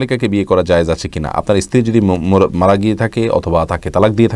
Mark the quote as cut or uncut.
uncut